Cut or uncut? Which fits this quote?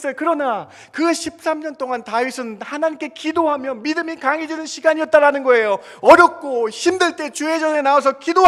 uncut